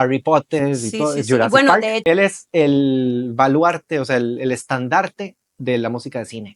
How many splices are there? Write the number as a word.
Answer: one